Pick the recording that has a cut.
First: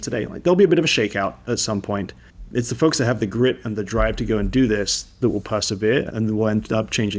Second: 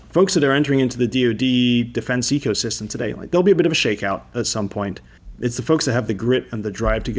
first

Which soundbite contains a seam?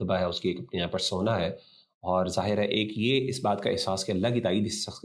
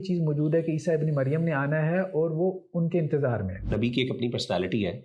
second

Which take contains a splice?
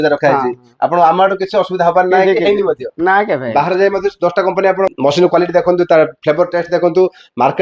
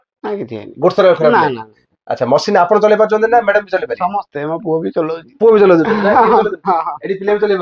first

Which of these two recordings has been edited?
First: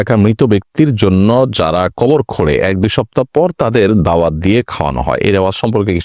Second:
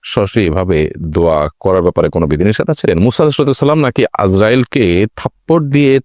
second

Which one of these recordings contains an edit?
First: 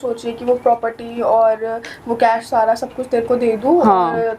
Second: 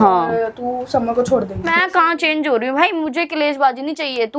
second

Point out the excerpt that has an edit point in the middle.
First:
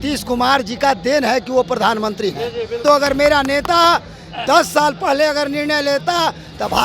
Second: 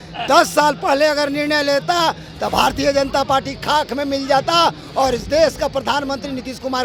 first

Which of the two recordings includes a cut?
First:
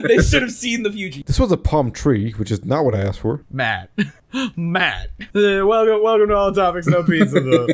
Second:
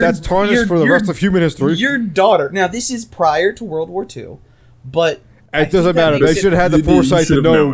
first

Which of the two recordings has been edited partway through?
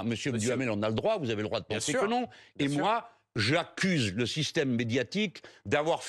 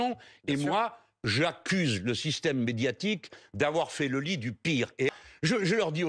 second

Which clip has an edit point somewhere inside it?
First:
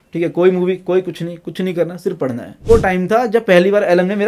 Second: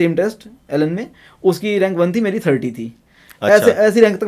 first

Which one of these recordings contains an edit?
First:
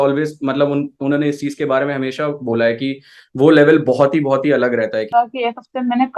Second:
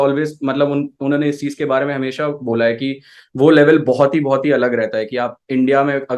first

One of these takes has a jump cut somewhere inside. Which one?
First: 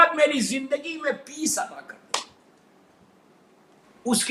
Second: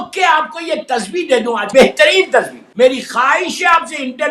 second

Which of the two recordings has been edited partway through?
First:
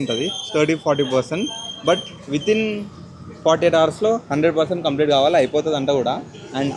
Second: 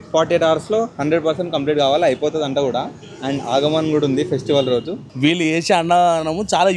second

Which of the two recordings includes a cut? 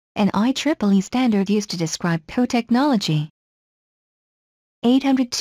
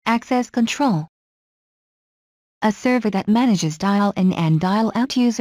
first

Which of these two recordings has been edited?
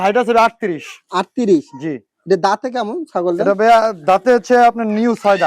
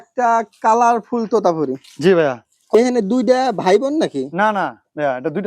second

